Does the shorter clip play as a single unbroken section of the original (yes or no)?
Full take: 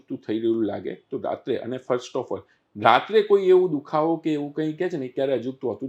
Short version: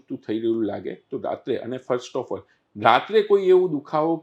yes